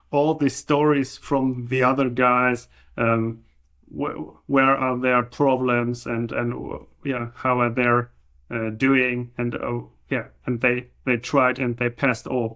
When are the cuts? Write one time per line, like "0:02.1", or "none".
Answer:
none